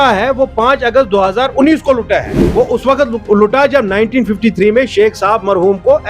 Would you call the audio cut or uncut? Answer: cut